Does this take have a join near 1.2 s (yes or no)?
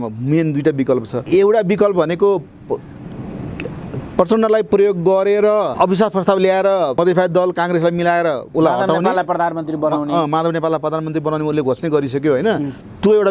yes